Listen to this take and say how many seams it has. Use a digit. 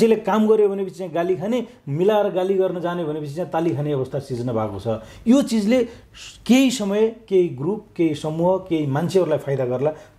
0